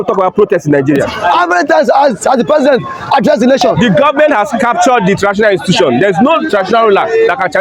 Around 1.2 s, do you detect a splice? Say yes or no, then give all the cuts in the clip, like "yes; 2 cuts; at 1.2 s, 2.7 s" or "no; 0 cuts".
yes; 2 cuts; at 1.2 s, 3.7 s